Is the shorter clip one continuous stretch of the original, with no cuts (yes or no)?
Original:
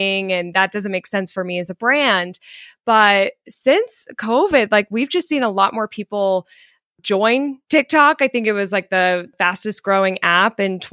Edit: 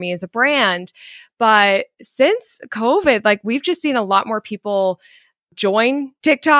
yes